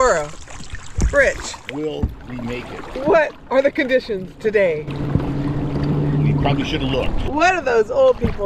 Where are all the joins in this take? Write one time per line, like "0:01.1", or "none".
0:07.2